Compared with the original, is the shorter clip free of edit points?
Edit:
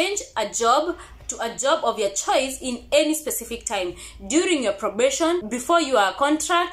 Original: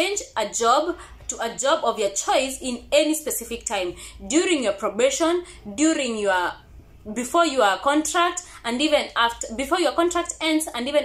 no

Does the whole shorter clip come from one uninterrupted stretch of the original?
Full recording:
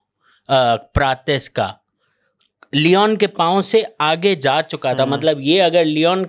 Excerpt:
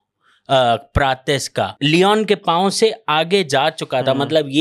no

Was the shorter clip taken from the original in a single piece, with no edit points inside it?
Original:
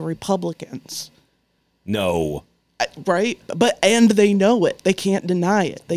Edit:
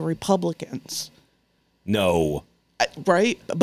yes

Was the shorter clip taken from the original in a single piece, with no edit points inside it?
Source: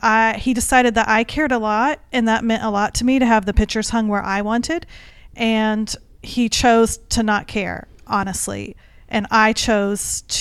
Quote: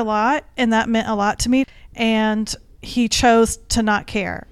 no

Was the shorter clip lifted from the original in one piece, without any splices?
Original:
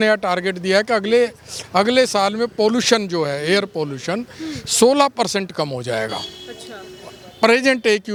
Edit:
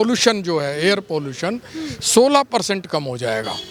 yes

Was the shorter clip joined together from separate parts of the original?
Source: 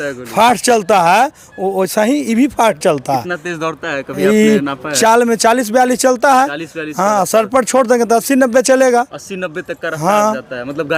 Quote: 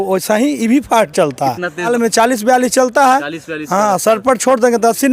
yes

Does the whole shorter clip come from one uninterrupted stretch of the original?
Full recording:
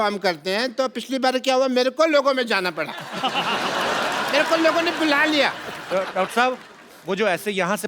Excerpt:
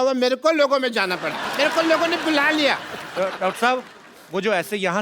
no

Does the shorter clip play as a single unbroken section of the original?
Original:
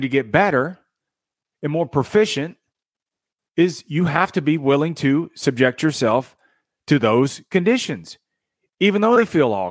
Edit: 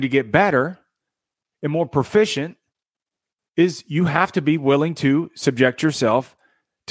yes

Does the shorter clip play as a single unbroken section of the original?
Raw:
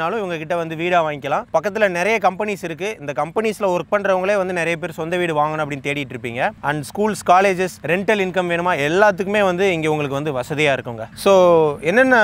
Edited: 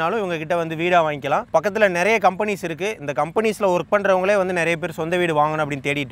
yes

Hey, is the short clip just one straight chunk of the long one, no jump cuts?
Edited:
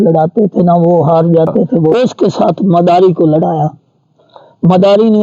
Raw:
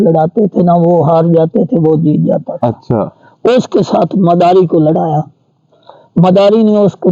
no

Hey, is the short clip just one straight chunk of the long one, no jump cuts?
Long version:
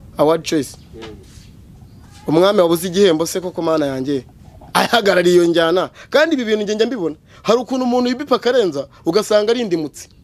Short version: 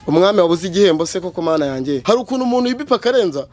no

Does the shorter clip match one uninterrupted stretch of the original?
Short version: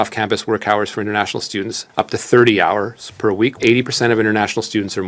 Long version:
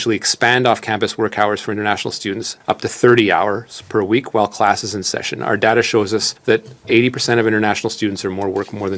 no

